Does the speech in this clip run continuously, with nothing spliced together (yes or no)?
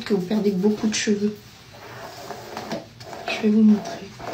yes